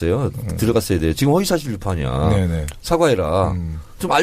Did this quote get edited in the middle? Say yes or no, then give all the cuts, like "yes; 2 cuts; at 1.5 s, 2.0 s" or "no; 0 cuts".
yes; 1 cut; at 1.8 s